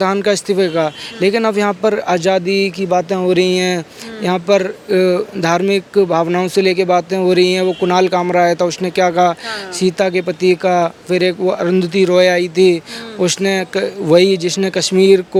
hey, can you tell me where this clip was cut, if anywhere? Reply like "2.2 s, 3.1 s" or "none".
none